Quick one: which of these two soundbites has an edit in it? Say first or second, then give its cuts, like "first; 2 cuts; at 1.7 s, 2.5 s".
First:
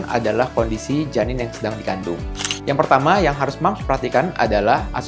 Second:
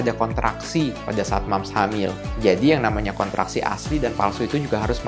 first; 1 cut; at 2.3 s